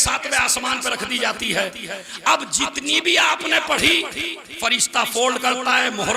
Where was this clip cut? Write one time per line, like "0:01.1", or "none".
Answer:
none